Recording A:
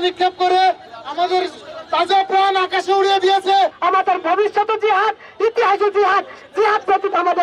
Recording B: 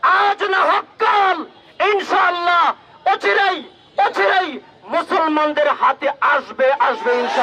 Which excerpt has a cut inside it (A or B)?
A